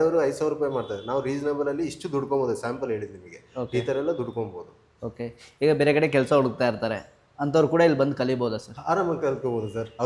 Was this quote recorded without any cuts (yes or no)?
yes